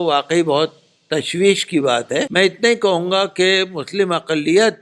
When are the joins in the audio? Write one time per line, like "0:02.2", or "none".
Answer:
0:02.3

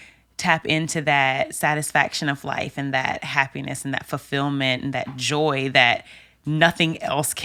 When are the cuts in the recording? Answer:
none

